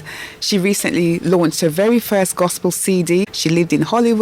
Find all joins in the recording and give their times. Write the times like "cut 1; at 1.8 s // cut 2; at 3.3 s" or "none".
none